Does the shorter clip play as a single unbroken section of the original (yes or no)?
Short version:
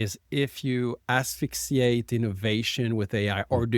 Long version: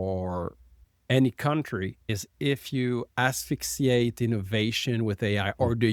yes